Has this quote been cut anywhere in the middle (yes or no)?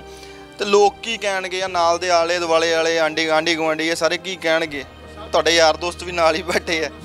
no